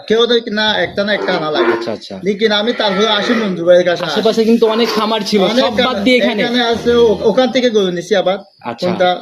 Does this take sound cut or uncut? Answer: uncut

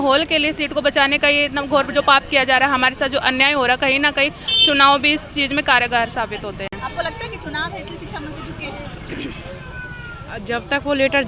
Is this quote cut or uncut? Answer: uncut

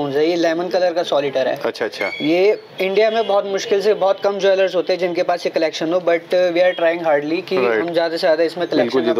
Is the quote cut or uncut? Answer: uncut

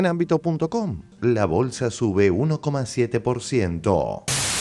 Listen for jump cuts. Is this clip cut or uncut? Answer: cut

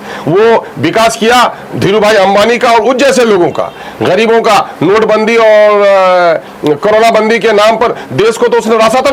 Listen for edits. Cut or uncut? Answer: uncut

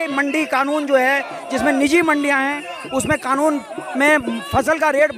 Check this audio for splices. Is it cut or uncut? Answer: uncut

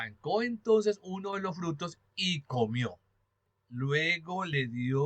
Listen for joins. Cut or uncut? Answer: cut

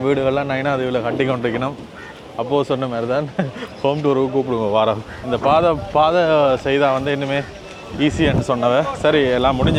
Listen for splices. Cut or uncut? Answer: uncut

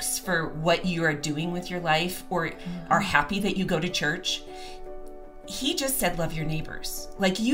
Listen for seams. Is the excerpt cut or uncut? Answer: uncut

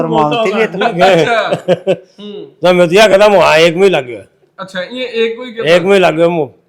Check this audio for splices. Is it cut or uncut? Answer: uncut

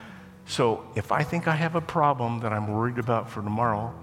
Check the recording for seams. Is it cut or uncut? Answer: uncut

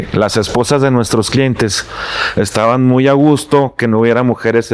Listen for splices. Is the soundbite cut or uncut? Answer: uncut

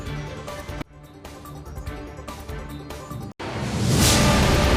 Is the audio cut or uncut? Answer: uncut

